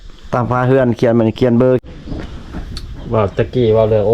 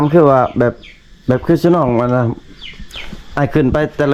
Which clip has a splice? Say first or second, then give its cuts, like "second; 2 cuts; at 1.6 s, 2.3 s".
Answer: first; 1 cut; at 1.8 s